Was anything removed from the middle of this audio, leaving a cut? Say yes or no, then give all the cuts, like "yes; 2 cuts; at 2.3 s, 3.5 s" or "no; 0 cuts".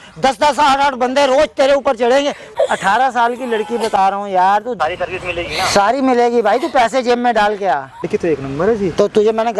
yes; 3 cuts; at 2.5 s, 4.8 s, 8.0 s